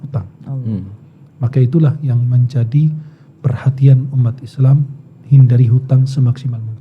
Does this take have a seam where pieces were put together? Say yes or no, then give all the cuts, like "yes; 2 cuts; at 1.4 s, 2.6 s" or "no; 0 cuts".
no; 0 cuts